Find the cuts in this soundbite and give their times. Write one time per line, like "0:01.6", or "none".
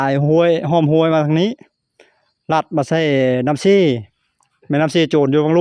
none